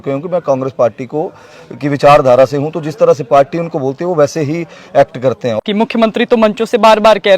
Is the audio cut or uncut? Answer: cut